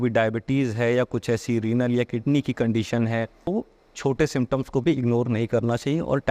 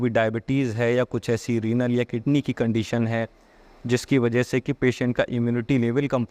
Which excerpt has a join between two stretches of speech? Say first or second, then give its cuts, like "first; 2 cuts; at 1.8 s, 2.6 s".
first; 1 cut; at 3.5 s